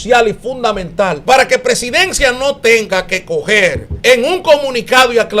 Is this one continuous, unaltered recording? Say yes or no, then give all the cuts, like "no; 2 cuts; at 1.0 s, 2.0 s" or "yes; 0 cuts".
no; 2 cuts; at 1.2 s, 3.9 s